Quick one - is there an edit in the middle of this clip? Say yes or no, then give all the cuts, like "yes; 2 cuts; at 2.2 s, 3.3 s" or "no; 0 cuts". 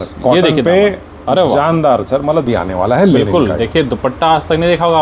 yes; 1 cut; at 2.5 s